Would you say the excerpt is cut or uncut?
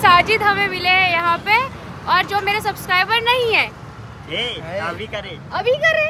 uncut